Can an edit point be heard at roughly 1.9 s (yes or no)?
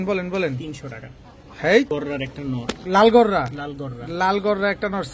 yes